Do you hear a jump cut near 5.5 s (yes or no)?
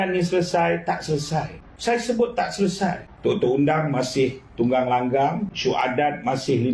yes